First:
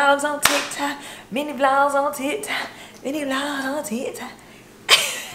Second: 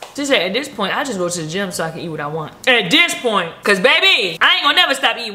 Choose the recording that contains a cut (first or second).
second